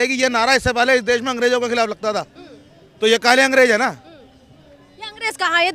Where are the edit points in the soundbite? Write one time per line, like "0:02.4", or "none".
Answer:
none